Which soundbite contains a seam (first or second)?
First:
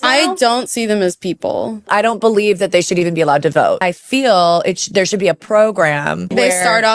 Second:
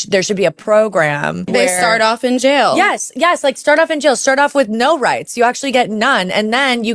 first